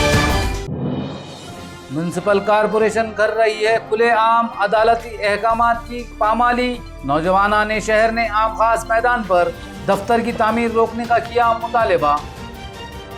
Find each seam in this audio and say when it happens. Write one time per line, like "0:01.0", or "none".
0:01.5